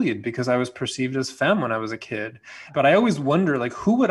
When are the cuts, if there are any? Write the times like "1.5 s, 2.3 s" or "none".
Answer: 2.7 s

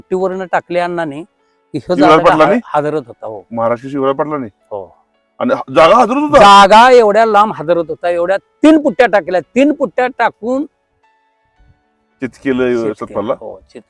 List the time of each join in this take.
none

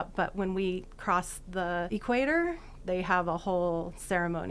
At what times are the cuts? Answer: 1.9 s

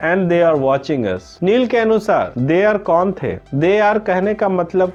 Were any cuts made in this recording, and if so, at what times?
none

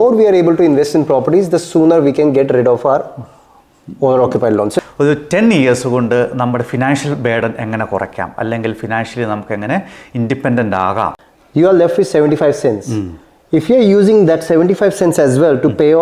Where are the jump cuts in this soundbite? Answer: 4.7 s, 11.3 s

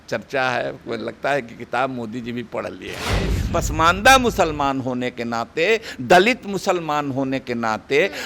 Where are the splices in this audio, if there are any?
3.4 s

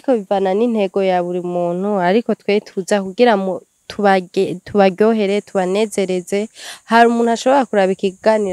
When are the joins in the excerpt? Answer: none

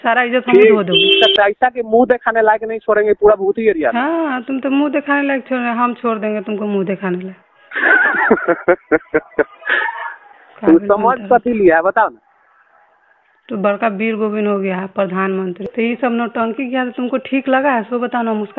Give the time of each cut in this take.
1.2 s, 15.6 s

